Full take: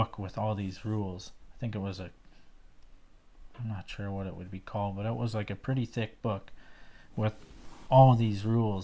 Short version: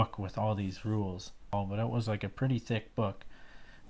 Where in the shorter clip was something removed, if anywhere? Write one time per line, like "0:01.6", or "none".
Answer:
0:01.5